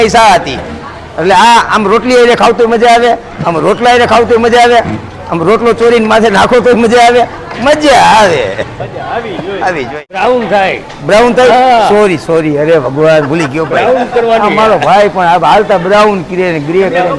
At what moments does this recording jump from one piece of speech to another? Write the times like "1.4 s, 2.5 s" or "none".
10.1 s